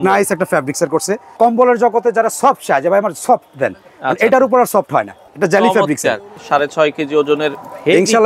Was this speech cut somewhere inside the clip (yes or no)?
yes